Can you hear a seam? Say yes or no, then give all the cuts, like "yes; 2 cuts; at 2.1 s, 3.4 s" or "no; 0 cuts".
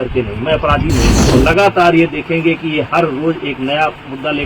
yes; 1 cut; at 1.2 s